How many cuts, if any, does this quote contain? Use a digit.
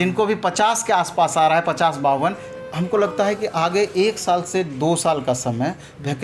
1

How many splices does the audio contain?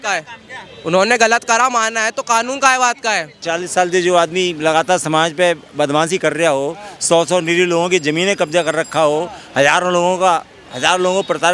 1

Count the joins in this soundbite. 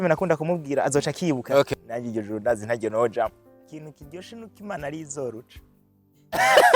2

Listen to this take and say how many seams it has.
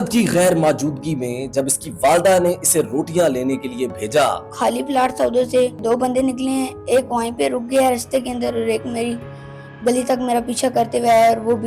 2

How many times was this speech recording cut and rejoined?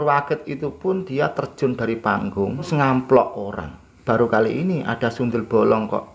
2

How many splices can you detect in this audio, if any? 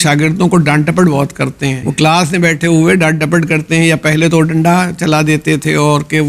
1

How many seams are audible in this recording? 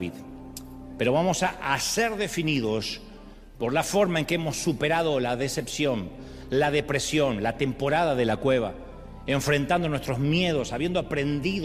0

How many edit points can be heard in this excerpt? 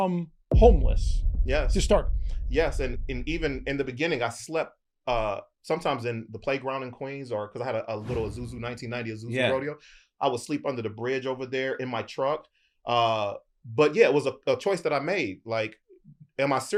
0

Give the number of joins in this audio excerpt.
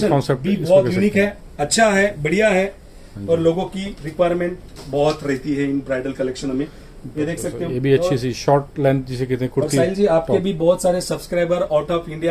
0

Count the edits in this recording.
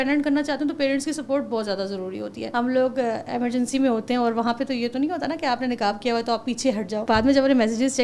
2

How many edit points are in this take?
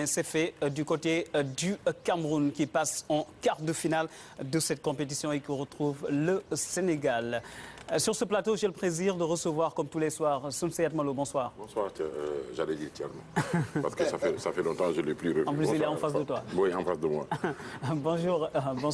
1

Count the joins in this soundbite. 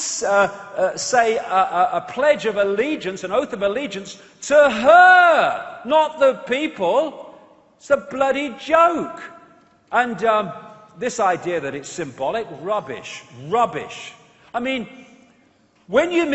1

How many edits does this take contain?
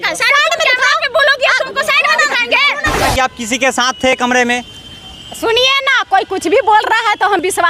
1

